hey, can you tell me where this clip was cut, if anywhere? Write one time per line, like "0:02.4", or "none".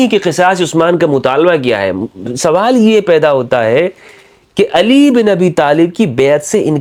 none